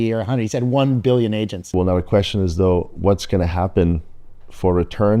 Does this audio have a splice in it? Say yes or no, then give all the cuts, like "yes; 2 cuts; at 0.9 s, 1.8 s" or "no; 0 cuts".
yes; 1 cut; at 1.7 s